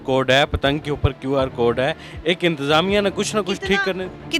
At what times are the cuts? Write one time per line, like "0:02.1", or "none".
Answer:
none